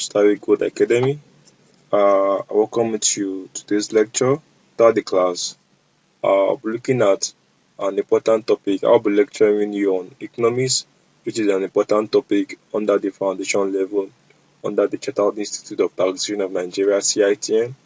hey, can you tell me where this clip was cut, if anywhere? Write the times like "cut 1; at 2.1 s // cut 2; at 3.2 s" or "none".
cut 1; at 4.7 s